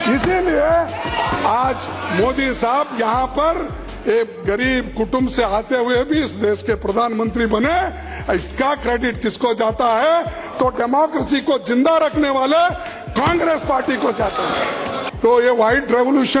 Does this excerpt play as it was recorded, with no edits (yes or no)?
no